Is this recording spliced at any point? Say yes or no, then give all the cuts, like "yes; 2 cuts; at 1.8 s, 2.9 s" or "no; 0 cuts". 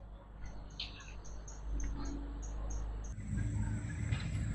yes; 1 cut; at 3.1 s